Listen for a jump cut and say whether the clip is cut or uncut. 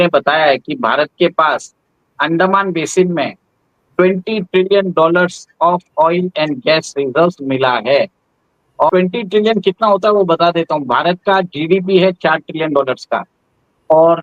cut